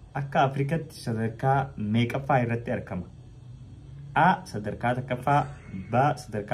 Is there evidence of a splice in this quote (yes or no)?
no